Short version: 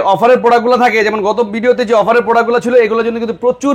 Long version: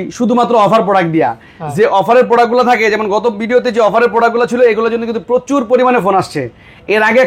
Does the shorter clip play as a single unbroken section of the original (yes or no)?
yes